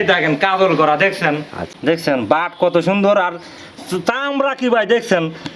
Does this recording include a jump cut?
yes; 1 cut; at 1.8 s

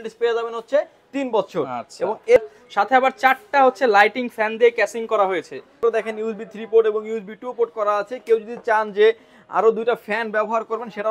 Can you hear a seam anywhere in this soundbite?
yes; 2 cuts; at 2.4 s, 5.8 s

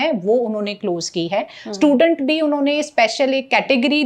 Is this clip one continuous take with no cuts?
yes; 0 cuts

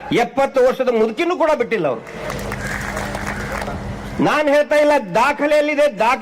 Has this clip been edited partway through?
yes; 1 cut; at 3.7 s

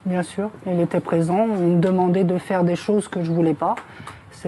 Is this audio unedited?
yes; 0 cuts

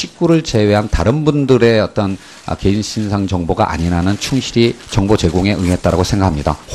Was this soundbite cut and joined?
no; 0 cuts

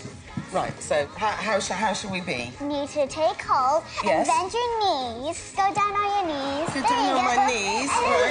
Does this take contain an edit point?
no; 0 cuts

